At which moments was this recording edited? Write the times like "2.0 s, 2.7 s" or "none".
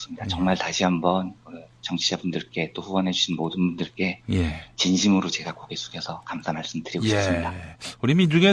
1.1 s